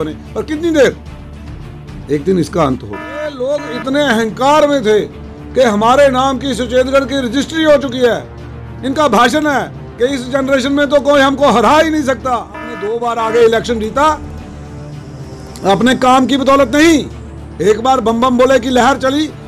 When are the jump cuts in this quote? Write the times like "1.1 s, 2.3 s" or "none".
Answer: 3.3 s, 12.9 s

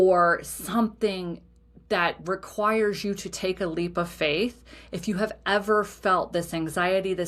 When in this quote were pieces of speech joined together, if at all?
none

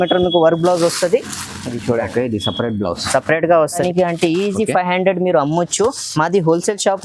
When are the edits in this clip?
3.8 s

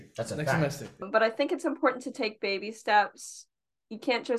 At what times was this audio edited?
1.1 s

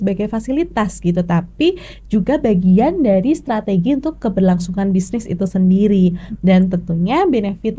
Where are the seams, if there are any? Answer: none

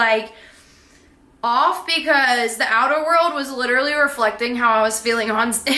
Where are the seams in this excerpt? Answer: none

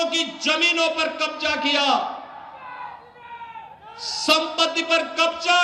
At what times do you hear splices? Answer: none

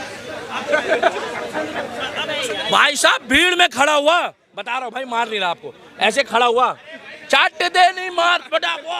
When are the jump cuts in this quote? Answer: none

